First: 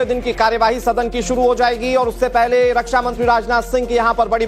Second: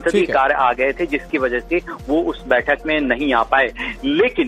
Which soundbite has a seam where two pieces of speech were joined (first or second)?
second